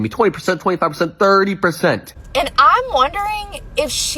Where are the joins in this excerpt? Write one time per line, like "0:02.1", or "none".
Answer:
0:02.1